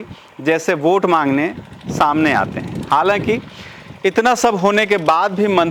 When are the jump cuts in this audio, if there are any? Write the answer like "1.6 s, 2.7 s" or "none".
none